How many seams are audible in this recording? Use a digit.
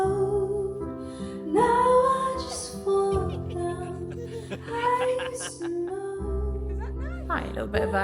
0